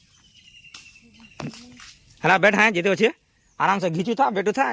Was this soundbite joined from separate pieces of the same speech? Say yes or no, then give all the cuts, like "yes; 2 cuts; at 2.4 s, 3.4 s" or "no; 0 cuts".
no; 0 cuts